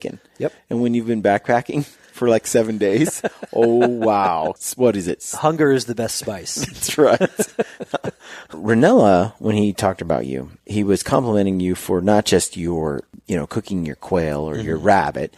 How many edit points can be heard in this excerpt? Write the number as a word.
two